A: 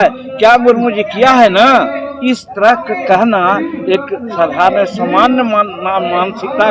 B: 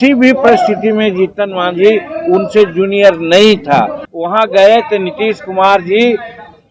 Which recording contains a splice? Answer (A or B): B